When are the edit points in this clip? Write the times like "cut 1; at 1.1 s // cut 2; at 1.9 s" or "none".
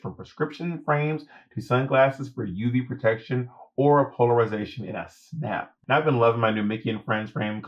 cut 1; at 5.8 s